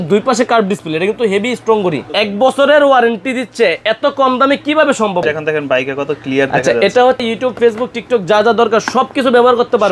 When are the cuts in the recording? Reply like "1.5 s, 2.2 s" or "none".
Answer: 2.1 s, 5.2 s, 7.2 s